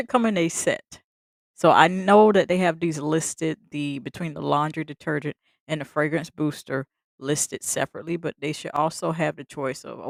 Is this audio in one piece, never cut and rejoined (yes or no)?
yes